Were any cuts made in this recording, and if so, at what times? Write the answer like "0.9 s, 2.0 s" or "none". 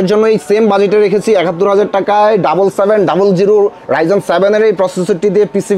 none